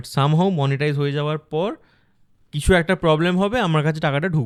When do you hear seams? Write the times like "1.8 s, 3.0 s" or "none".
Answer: none